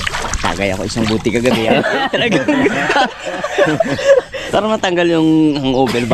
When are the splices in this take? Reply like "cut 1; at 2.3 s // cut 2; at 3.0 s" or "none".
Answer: cut 1; at 4.4 s